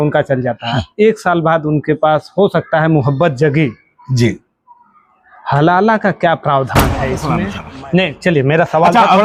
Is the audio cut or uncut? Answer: cut